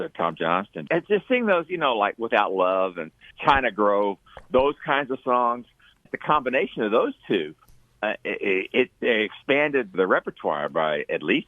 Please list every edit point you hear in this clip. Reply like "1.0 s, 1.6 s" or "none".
0.8 s, 3.3 s, 6.1 s, 9.9 s